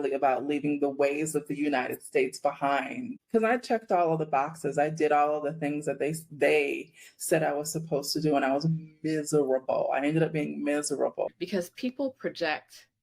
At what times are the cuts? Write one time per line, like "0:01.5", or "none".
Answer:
0:11.4